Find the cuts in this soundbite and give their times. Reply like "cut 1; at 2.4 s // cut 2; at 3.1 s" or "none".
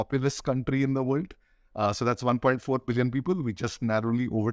none